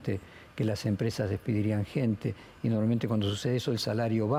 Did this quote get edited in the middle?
no; 0 cuts

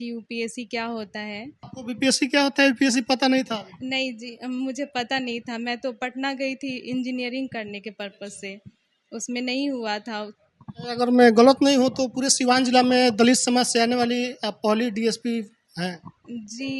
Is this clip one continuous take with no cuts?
no; 2 cuts; at 1.7 s, 10.3 s

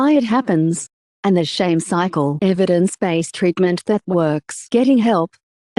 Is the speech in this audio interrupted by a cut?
yes; 1 cut; at 4.5 s

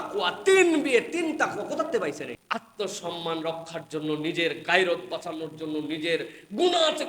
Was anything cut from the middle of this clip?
yes; 1 cut; at 2.4 s

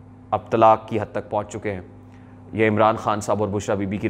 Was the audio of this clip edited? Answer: no; 0 cuts

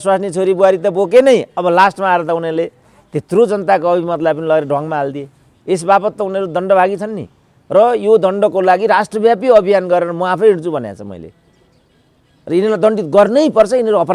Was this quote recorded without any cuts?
yes; 0 cuts

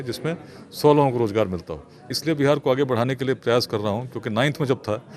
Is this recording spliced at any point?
yes; 1 cut; at 2.1 s

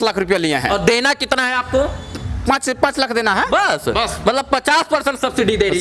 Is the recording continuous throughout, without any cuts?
yes; 0 cuts

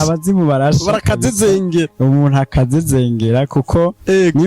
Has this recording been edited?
no; 0 cuts

